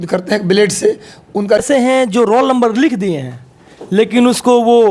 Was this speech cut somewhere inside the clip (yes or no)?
yes